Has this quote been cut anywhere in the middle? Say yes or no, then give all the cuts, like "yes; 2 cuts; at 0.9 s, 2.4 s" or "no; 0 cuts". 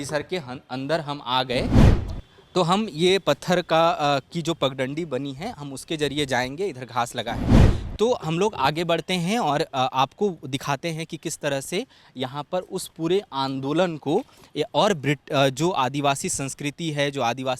yes; 1 cut; at 1.9 s